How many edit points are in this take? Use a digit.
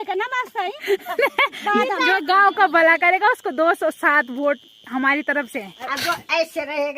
2